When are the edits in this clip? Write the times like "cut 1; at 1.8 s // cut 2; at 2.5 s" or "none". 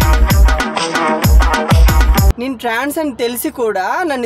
cut 1; at 2.0 s